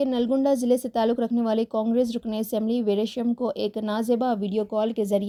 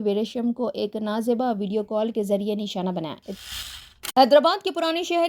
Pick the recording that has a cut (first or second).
second